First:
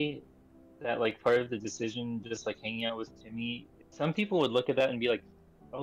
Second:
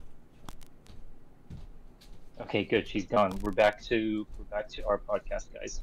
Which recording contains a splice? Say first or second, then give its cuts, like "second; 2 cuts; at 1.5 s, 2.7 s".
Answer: first; 1 cut; at 3.7 s